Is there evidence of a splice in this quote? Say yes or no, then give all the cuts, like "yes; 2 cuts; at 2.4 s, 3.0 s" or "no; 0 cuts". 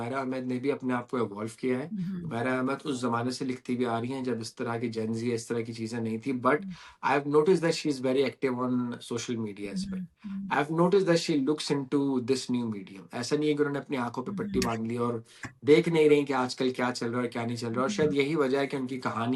no; 0 cuts